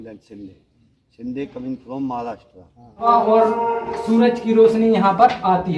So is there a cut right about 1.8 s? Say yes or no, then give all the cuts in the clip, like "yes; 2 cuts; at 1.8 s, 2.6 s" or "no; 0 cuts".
no; 1 cut; at 3.0 s